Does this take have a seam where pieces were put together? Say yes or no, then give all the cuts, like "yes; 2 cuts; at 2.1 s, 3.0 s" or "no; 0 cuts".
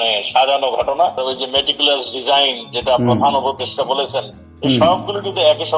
yes; 1 cut; at 1.2 s